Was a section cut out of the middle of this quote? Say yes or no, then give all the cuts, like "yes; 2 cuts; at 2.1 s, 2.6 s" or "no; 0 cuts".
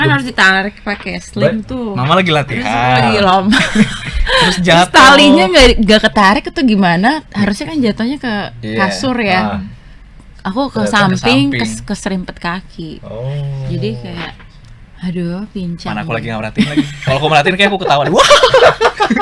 no; 0 cuts